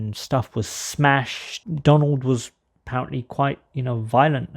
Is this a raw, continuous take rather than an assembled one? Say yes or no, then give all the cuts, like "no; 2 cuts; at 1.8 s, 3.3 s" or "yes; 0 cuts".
no; 1 cut; at 1.6 s